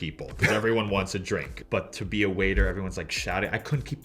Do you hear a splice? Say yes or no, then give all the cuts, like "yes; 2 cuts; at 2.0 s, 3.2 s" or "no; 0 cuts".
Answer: yes; 1 cut; at 1.5 s